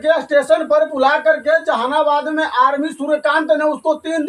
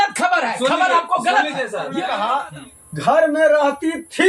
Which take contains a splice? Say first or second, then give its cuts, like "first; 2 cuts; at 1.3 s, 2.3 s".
second; 1 cut; at 1.9 s